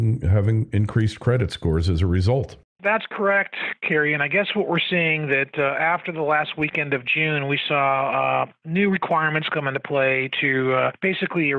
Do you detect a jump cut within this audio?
no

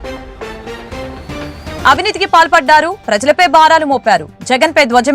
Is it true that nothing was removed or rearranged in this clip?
no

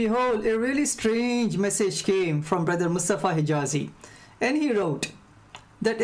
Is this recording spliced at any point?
yes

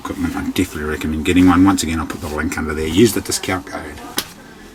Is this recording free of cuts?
yes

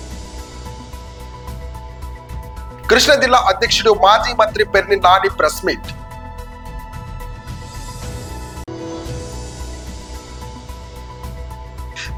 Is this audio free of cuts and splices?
yes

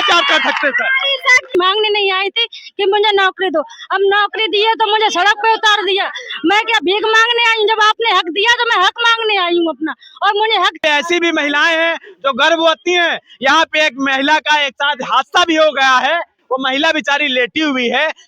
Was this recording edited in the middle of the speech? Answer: yes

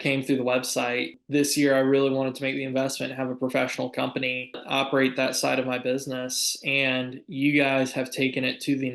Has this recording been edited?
yes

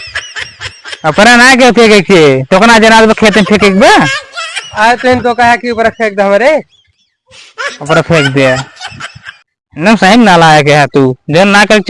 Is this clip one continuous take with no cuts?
no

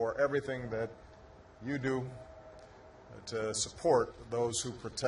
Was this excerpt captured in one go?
no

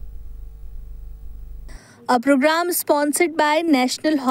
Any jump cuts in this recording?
yes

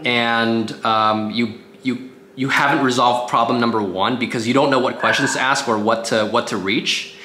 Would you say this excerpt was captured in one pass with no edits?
yes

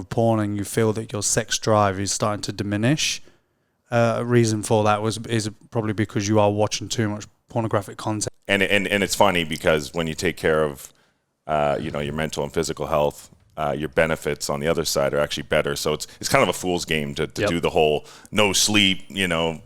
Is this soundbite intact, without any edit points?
no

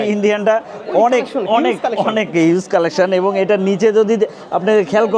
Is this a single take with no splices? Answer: yes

